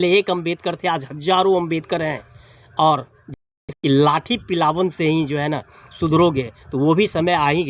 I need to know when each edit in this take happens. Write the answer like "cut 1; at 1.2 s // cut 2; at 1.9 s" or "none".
cut 1; at 3.3 s